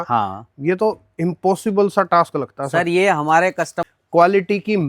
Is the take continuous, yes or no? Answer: no